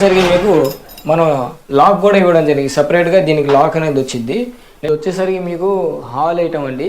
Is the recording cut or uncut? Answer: cut